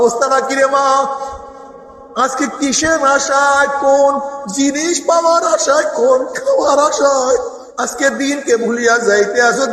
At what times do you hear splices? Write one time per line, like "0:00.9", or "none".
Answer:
0:07.6